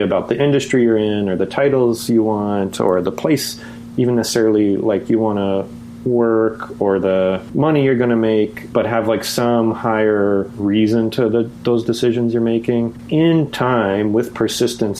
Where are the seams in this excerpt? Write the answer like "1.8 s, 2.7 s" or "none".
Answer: 12.9 s